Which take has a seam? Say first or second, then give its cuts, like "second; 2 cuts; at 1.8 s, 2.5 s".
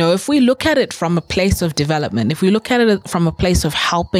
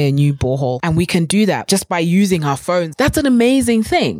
second; 3 cuts; at 0.8 s, 1.6 s, 2.9 s